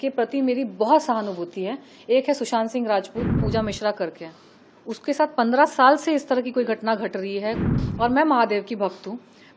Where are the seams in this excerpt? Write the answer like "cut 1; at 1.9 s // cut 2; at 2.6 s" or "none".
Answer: cut 1; at 3.4 s // cut 2; at 7.7 s